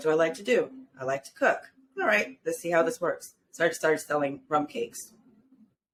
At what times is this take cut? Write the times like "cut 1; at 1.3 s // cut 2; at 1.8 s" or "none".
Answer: none